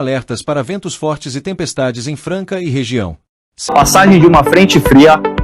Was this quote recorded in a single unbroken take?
no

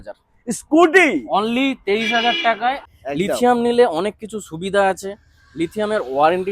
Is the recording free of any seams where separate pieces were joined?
no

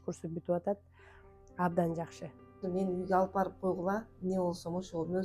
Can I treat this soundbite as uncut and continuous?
no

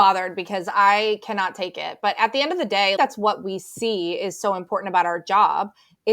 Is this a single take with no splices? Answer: no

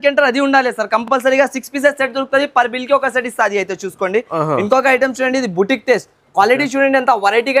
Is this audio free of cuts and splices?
yes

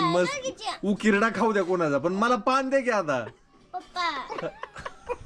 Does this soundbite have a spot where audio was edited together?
no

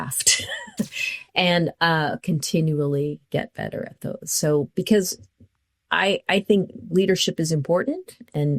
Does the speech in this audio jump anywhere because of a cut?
yes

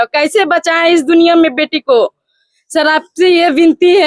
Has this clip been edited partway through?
no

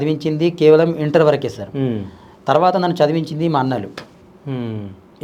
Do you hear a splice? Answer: no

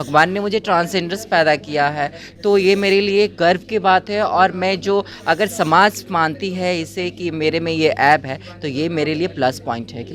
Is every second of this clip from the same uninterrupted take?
yes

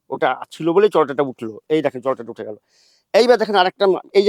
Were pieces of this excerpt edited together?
no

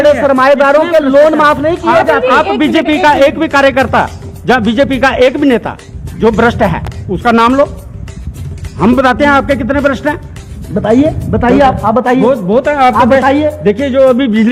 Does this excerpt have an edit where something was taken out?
no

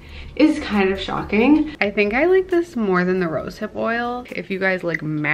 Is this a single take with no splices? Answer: no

